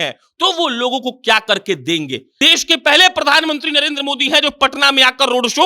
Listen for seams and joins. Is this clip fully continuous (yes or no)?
no